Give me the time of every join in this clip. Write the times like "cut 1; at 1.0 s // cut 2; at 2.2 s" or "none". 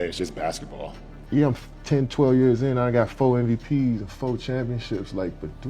cut 1; at 1.0 s